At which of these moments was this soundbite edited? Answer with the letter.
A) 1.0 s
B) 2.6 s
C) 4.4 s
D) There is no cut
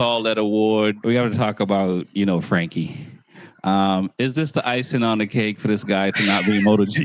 A